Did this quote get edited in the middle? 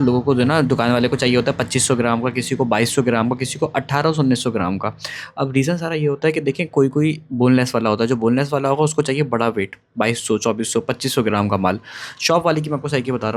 no; 0 cuts

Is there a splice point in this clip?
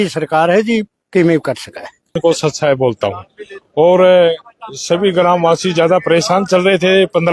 yes; 1 cut; at 2.2 s

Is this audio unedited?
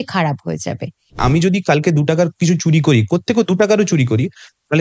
no; 1 cut; at 1.2 s

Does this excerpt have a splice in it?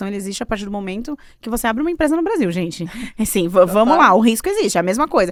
no; 0 cuts

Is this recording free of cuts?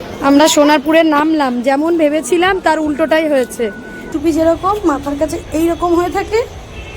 no; 1 cut; at 4.1 s

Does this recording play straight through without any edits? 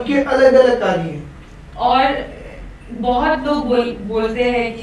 no; 1 cut; at 1.4 s

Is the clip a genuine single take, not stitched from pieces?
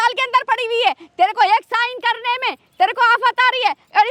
yes; 0 cuts

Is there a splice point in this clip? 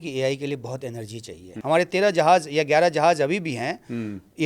yes; 1 cut; at 1.5 s

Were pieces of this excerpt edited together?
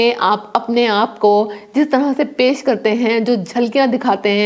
no; 0 cuts

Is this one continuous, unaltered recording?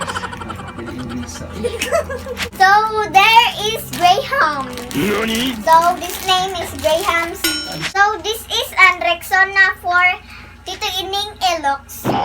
no; 2 cuts; at 2.4 s, 7.7 s

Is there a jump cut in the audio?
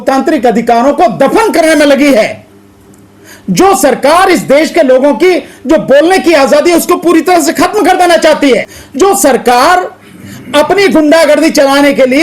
yes; 1 cut; at 8.8 s

